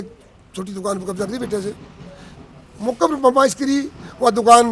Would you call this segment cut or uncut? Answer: uncut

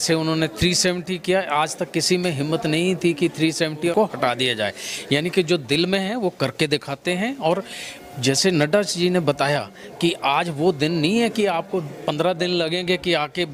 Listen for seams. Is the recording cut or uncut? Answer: uncut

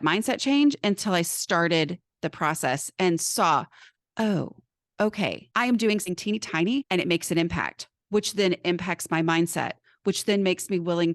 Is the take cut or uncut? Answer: cut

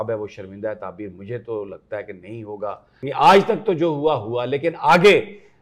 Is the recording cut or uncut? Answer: cut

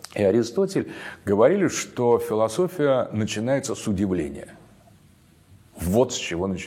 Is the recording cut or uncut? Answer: uncut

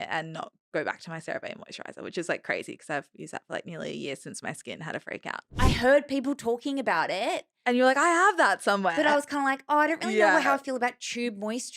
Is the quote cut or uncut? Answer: cut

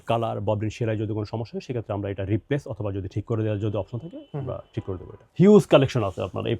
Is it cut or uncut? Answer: cut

